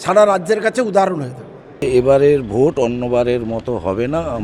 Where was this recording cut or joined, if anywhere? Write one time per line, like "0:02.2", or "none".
0:01.8